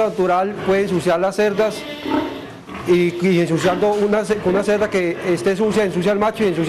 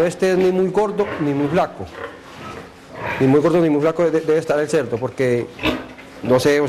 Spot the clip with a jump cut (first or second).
second